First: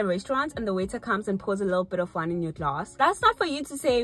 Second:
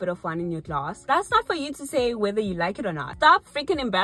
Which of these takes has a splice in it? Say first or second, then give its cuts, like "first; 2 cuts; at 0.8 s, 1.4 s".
second; 1 cut; at 3.1 s